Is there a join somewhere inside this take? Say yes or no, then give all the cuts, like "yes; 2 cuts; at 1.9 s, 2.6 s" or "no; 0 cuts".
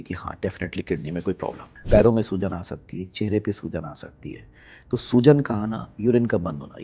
yes; 1 cut; at 1.7 s